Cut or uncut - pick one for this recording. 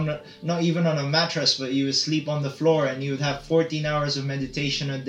uncut